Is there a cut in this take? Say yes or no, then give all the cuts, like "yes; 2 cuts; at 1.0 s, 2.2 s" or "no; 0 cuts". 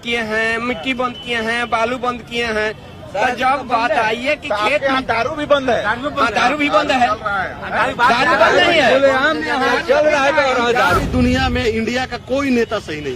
yes; 1 cut; at 11.0 s